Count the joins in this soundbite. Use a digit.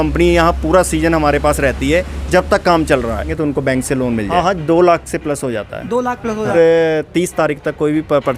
3